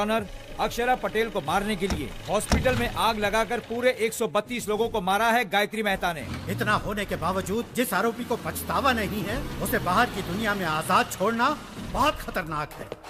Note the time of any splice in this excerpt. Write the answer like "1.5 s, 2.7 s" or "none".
6.2 s